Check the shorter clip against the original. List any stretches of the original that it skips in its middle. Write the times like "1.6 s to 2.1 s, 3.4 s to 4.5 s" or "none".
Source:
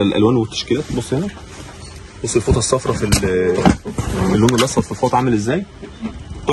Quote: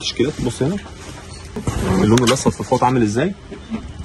2.1 s to 3.9 s